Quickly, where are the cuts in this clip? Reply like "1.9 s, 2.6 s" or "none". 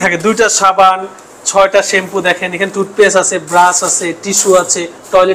none